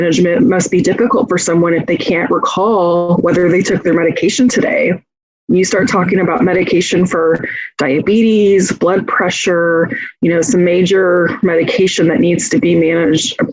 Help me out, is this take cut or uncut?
uncut